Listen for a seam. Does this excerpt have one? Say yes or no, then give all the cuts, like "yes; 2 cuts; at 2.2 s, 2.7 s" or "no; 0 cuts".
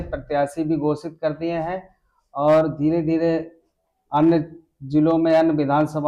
no; 0 cuts